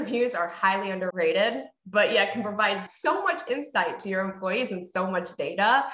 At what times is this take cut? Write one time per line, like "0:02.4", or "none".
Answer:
0:01.1
0:02.9